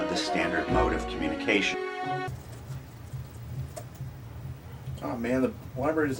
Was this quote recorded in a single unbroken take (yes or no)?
no